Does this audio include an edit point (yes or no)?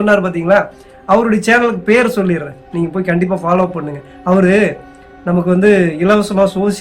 no